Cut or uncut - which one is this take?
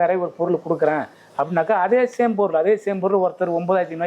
uncut